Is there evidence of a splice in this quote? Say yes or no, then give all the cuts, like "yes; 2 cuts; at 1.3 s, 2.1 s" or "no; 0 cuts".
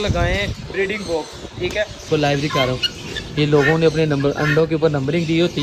yes; 1 cut; at 2.1 s